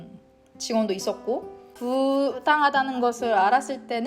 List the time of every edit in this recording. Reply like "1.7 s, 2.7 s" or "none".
1.7 s